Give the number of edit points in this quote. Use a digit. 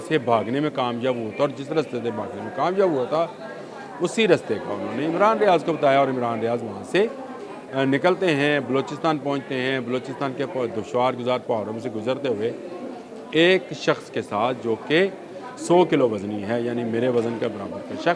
0